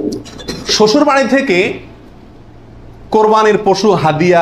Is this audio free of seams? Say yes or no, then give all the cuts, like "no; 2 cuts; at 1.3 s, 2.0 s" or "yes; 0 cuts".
yes; 0 cuts